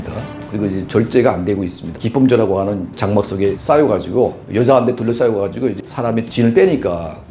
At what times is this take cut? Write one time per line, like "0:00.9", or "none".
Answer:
0:05.8

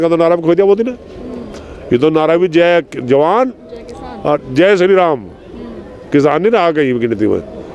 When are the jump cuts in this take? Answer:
none

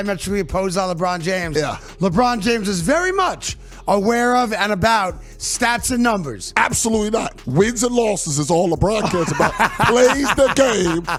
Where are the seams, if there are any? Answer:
none

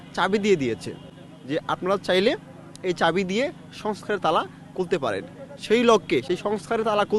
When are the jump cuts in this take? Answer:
none

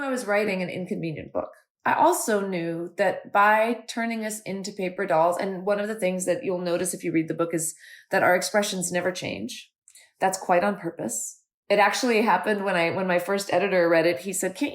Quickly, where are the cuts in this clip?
0:01.6

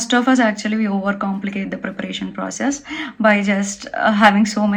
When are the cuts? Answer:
none

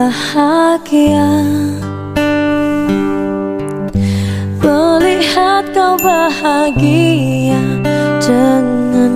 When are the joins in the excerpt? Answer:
none

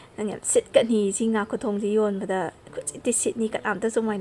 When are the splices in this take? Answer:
none

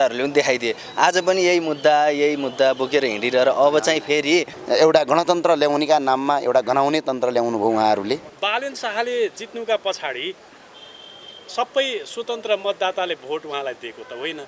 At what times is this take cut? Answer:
0:04.5
0:08.3

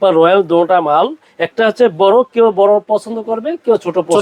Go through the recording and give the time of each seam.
none

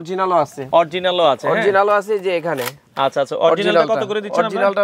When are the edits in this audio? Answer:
none

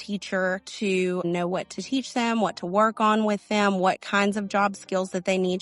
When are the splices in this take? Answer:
0:01.2

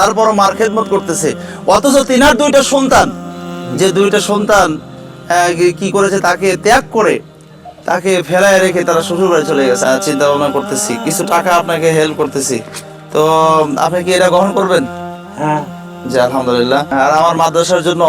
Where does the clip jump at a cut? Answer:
0:09.8
0:16.9

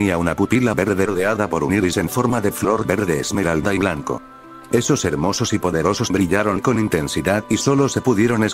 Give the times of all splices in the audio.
0:06.1

